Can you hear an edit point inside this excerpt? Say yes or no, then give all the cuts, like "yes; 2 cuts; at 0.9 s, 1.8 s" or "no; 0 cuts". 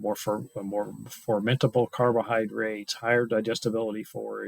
no; 0 cuts